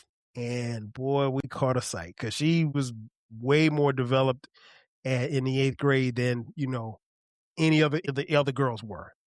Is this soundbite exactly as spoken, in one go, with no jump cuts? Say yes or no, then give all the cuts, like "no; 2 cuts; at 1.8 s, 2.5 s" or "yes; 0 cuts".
no; 2 cuts; at 2.8 s, 8.1 s